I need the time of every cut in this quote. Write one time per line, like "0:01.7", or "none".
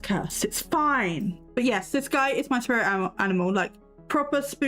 0:01.4